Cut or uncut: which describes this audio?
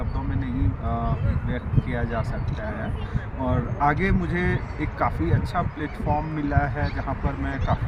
uncut